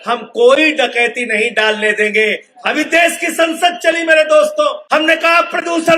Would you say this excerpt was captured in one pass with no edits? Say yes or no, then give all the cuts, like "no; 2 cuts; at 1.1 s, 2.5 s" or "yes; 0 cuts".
no; 2 cuts; at 2.5 s, 4.8 s